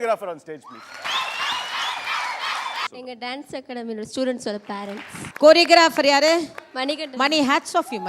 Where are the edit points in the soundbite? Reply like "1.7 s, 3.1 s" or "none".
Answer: 2.9 s